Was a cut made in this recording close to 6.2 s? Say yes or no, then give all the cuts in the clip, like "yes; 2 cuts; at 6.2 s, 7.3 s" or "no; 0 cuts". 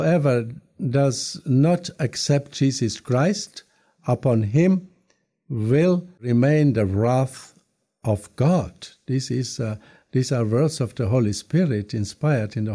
yes; 1 cut; at 6.2 s